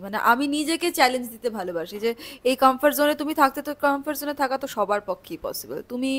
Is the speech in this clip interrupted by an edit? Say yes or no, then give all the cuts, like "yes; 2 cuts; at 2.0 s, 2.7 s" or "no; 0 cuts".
no; 0 cuts